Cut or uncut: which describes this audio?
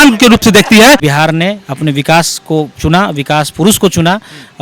cut